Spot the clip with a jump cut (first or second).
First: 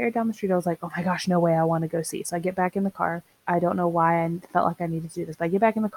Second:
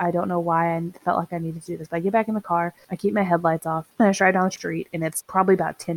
second